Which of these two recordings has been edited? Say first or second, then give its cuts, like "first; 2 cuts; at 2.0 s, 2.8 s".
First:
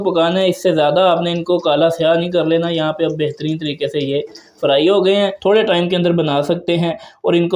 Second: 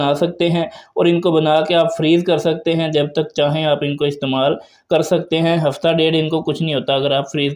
first; 1 cut; at 5.4 s